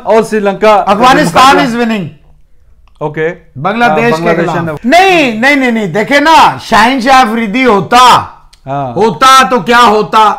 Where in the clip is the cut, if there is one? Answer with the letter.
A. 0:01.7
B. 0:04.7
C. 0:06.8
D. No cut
B